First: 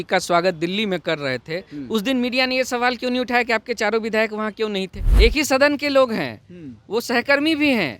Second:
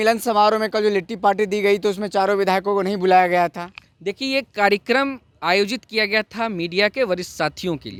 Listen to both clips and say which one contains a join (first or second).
first